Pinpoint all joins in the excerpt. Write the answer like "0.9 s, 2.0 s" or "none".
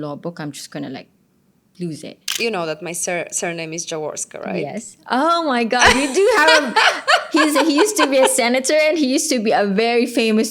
2.2 s